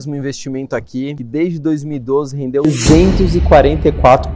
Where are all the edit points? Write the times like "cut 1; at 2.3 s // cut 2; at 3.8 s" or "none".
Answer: cut 1; at 1.2 s // cut 2; at 2.7 s